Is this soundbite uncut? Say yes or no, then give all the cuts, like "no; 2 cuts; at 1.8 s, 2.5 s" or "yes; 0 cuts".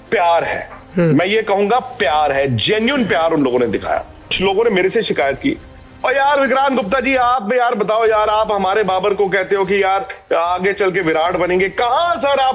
no; 1 cut; at 4.4 s